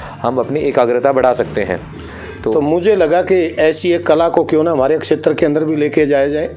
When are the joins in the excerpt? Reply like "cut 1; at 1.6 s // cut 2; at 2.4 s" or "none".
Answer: cut 1; at 2.5 s